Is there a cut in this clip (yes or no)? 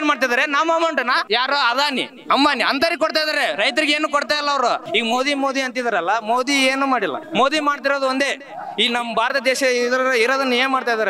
yes